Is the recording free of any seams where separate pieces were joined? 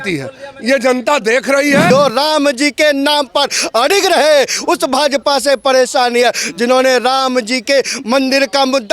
no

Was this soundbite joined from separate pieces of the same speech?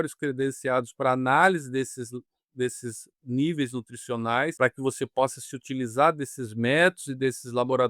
yes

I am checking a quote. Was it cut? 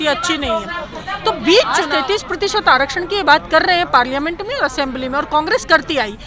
yes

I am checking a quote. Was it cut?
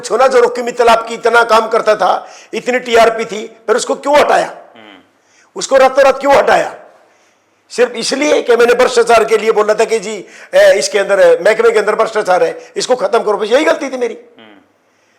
no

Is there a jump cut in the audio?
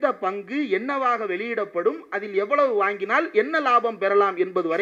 no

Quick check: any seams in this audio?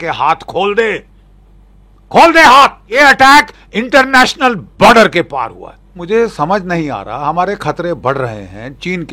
yes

